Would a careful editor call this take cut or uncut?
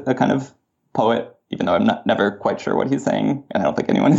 uncut